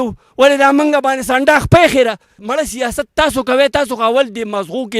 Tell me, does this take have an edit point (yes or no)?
yes